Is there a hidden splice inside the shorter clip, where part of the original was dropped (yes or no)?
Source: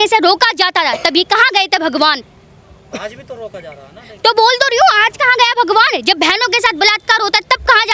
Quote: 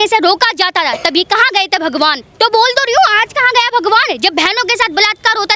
yes